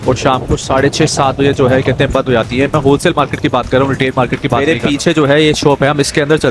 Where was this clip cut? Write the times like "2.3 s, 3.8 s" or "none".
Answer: 4.6 s